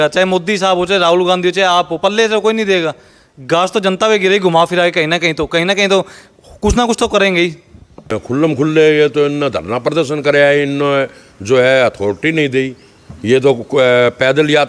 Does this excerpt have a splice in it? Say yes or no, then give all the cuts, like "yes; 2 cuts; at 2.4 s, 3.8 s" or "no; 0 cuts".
yes; 1 cut; at 8.2 s